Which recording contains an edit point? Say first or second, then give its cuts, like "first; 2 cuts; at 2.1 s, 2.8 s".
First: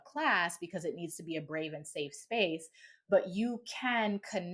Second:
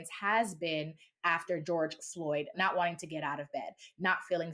second; 2 cuts; at 1.6 s, 2.5 s